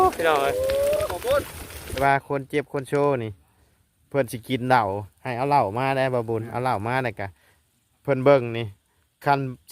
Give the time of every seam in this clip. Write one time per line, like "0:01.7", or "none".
0:02.0